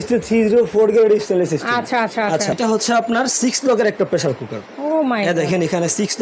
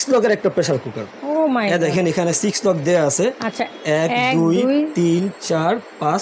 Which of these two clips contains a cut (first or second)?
first